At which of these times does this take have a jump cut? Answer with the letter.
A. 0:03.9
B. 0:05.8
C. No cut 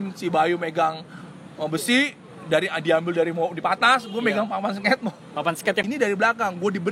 B